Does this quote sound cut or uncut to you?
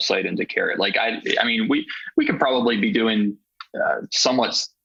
uncut